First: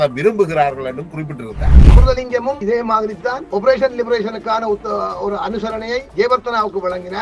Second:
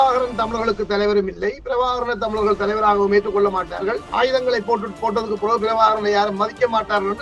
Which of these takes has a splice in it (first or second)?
first